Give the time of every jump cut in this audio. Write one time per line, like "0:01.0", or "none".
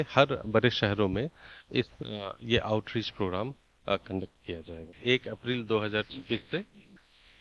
0:04.9